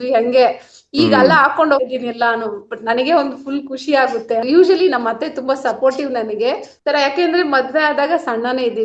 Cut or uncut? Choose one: cut